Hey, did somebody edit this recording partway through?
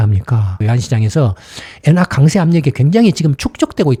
no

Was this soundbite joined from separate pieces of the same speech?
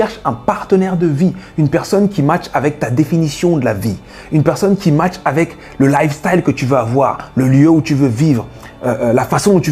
no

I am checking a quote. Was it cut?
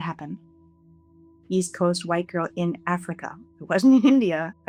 no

